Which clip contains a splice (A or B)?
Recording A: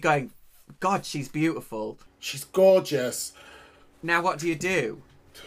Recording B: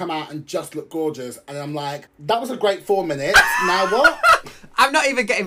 B